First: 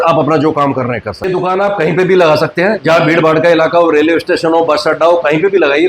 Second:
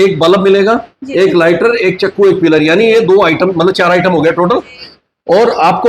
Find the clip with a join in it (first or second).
first